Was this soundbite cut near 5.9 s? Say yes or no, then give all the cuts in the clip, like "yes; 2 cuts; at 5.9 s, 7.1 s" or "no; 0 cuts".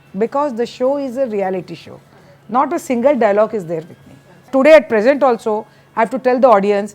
no; 1 cut; at 4.4 s